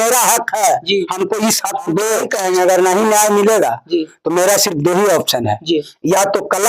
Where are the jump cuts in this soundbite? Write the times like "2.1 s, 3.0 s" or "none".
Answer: 2.3 s